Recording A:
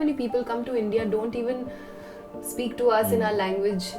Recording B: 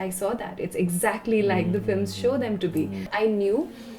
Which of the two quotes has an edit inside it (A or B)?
B